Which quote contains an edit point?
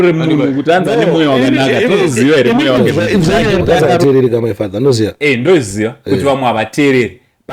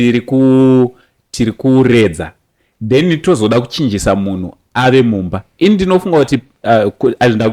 first; 1 cut; at 3.6 s

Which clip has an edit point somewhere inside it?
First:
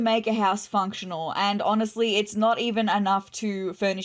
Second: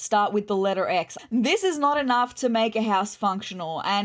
second; 1 cut; at 1.1 s

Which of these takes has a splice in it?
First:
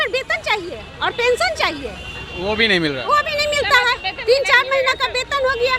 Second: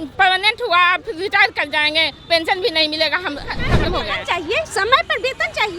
second; 1 cut; at 3.7 s

